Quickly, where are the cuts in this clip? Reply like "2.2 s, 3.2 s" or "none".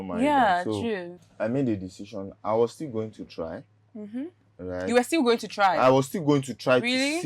1.2 s